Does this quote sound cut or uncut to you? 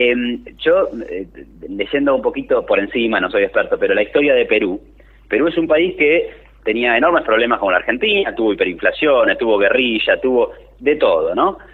uncut